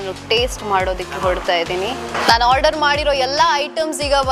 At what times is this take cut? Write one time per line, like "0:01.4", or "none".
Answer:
0:02.1